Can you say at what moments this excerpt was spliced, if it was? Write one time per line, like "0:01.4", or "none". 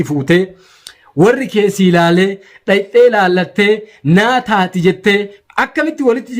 0:05.4